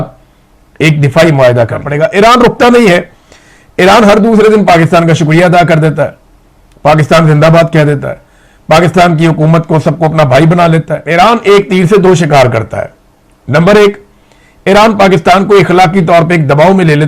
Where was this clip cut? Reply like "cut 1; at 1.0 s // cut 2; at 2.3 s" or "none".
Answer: cut 1; at 1.9 s // cut 2; at 11.0 s